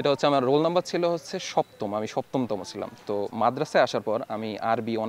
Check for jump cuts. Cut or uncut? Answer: uncut